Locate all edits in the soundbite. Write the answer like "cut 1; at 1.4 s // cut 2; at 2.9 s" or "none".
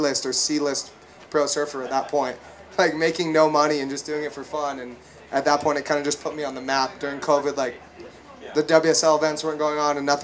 none